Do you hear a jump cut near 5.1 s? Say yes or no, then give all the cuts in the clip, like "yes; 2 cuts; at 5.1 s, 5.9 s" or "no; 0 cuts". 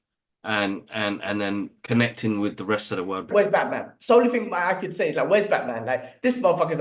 no; 1 cut; at 3.3 s